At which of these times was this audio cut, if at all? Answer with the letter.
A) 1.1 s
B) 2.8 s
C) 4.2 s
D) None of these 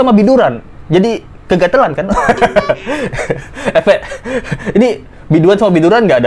D